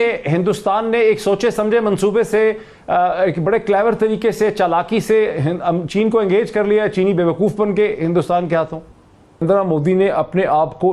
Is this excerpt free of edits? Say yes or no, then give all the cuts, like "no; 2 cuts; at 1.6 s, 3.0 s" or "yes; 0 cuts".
no; 1 cut; at 9.4 s